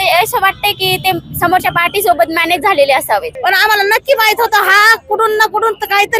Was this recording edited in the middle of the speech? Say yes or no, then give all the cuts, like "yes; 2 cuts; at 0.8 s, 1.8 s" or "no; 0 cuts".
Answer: yes; 1 cut; at 3.3 s